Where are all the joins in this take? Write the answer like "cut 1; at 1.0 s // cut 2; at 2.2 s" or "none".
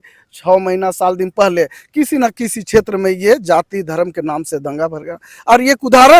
none